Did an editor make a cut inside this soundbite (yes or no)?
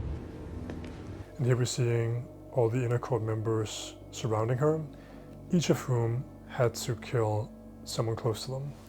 yes